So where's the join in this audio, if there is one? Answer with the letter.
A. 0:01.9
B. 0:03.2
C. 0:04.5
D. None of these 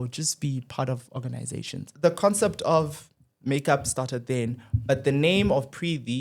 A